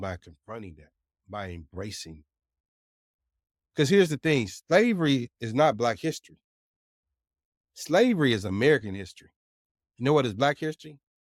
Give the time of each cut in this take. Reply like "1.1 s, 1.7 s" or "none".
none